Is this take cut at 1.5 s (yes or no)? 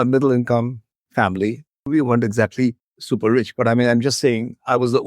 no